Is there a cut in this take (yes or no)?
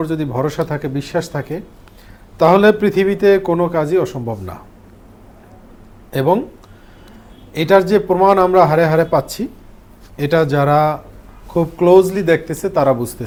no